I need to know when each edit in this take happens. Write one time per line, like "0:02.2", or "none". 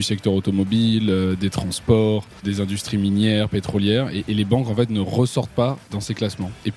0:02.4
0:05.9